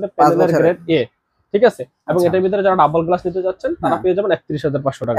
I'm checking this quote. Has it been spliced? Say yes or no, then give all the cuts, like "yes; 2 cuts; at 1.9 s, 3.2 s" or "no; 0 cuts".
no; 0 cuts